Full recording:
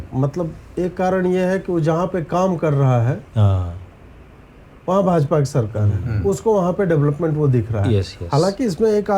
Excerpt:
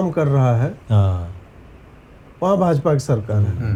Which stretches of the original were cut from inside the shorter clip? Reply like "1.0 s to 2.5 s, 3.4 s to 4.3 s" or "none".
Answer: none